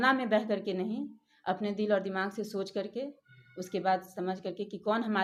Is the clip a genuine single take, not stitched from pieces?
yes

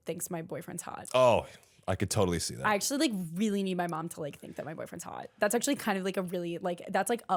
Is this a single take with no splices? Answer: yes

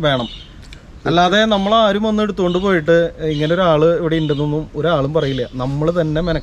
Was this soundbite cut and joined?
no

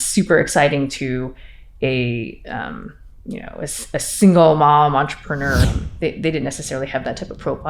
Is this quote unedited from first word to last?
no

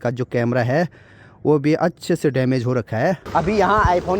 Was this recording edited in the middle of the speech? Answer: yes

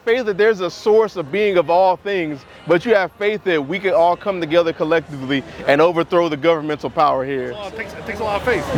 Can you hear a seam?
no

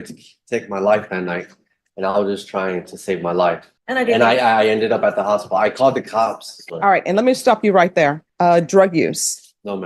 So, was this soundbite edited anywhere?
yes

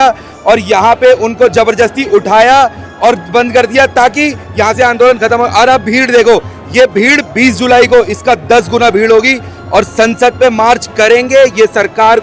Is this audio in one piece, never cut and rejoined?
yes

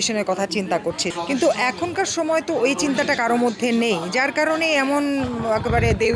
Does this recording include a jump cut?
yes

